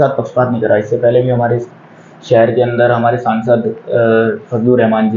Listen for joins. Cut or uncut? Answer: uncut